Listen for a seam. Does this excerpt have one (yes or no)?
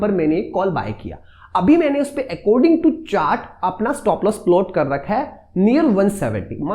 no